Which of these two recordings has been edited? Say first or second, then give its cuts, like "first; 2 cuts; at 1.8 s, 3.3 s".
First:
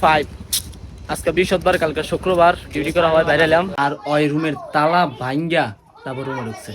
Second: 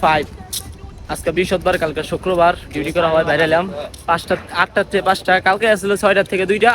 first; 1 cut; at 3.7 s